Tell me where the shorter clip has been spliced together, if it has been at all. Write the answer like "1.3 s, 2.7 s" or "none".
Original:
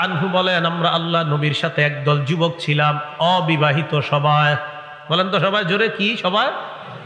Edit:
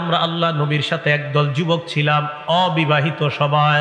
none

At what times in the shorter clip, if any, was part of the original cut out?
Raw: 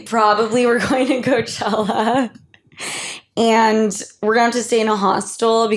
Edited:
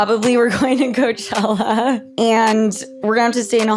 2.1 s

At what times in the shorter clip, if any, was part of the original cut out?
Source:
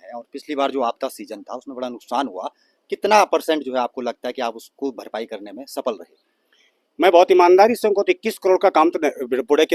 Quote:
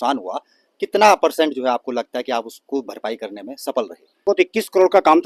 4.2 s

